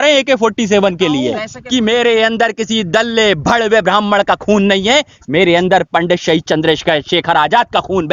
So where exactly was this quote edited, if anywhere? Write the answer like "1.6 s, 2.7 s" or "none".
1.5 s